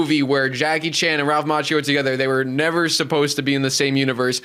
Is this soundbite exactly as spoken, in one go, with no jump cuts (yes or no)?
yes